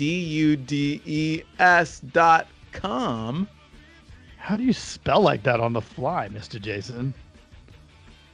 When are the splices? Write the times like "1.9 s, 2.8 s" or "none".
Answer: 7.2 s